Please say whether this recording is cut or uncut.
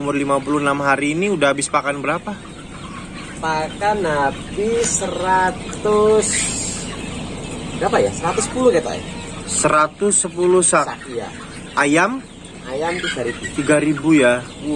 uncut